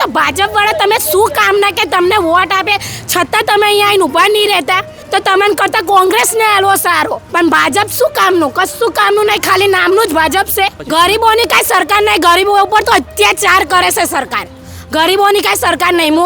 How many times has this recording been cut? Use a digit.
3